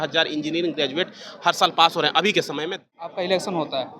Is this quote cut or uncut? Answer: cut